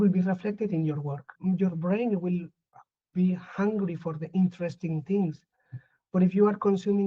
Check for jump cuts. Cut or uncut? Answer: cut